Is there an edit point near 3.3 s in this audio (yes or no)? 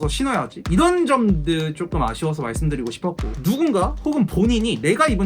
yes